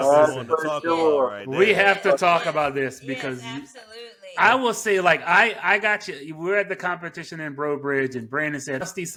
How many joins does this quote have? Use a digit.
0